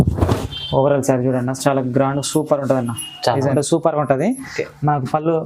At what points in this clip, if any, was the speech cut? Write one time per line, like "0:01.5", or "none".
0:03.5